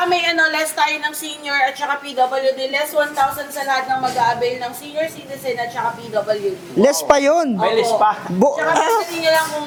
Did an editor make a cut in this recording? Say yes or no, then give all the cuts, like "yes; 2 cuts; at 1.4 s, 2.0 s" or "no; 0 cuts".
no; 0 cuts